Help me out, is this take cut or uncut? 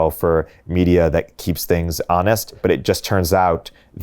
cut